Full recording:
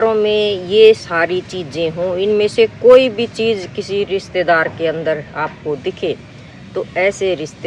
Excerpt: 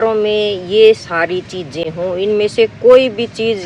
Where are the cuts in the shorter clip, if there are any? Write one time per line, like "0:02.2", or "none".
none